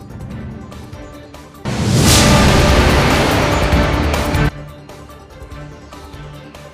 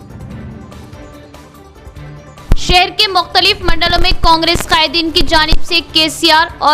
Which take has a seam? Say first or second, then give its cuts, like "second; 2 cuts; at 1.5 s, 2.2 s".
second; 1 cut; at 1.5 s